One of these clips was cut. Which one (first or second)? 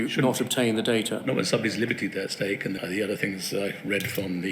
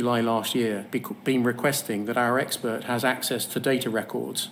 first